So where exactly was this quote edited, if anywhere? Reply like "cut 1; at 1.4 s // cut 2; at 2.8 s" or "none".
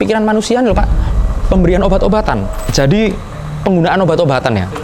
cut 1; at 2.7 s

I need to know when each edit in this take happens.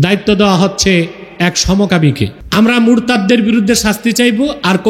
cut 1; at 2.4 s

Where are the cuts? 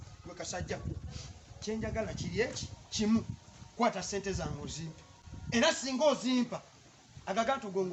none

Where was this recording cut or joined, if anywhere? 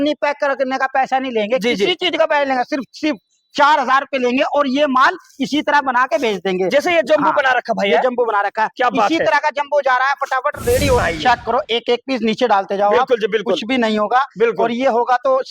cut 1; at 11.0 s

